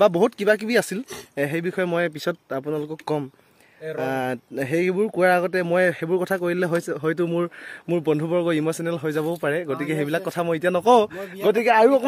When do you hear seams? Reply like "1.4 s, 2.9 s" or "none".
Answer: none

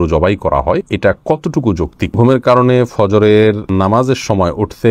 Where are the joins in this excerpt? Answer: 0.9 s, 2.2 s, 3.6 s

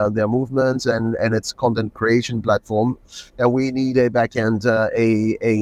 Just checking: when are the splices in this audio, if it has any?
none

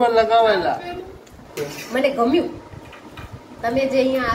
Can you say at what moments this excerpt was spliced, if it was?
1.4 s

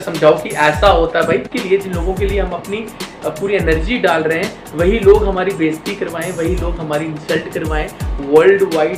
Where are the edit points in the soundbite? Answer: 1.5 s

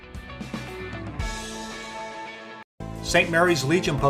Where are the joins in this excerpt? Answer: 2.2 s

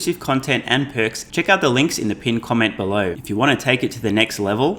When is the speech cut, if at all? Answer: 1.2 s, 3.2 s

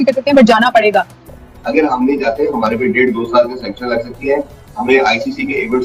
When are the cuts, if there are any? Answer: 1.2 s

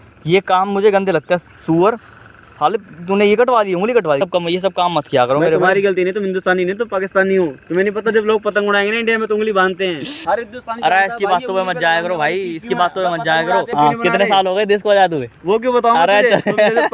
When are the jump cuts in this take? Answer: 4.2 s, 10.1 s, 13.7 s

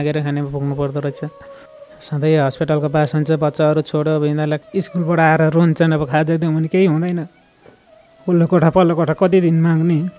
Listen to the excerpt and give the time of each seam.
4.6 s

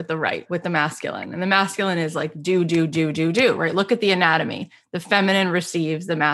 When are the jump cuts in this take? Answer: none

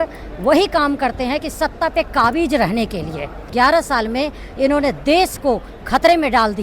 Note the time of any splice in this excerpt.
3.5 s

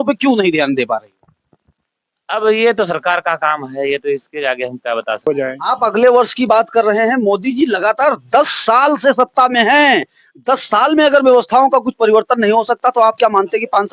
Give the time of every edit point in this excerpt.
5.3 s

